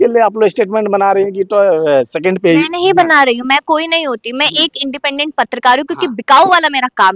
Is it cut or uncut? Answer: uncut